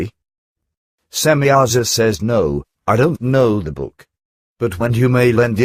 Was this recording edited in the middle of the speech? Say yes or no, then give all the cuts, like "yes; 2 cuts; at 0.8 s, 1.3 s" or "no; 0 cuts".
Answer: yes; 1 cut; at 2.3 s